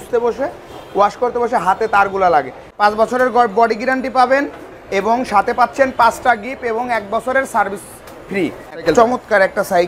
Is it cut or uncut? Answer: cut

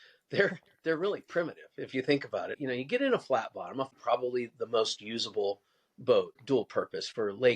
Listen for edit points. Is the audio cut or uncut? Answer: cut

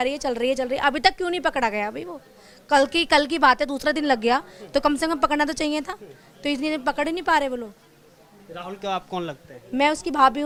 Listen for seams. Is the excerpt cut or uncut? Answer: uncut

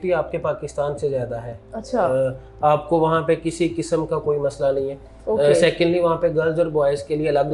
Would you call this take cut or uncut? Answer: uncut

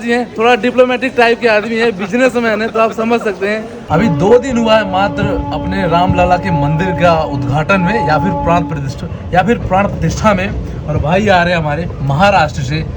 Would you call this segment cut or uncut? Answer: cut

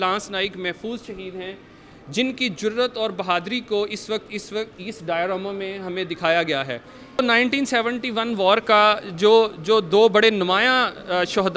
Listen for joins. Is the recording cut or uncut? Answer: cut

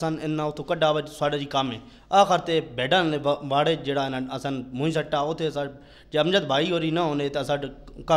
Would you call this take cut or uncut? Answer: uncut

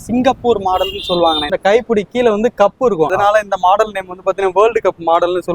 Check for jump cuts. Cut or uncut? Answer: cut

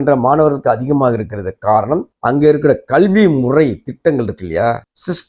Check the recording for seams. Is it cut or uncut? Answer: uncut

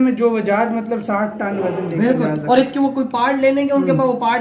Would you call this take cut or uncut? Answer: uncut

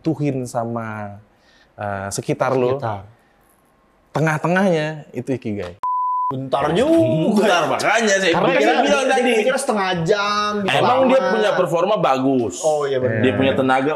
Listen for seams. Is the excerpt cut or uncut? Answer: cut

